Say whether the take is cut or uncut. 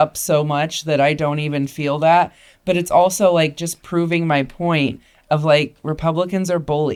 uncut